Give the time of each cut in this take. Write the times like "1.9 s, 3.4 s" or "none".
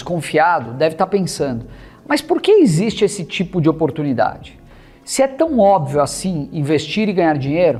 none